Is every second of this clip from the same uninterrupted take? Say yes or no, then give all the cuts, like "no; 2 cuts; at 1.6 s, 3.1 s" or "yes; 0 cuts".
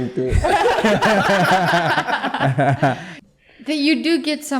no; 1 cut; at 3.1 s